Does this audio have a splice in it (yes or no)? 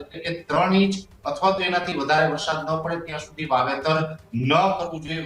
no